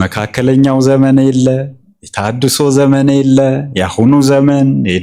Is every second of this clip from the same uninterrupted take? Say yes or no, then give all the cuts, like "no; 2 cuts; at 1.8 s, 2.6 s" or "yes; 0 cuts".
yes; 0 cuts